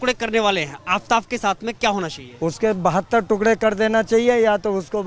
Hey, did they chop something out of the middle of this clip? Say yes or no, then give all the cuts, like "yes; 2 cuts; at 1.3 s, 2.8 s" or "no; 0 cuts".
no; 0 cuts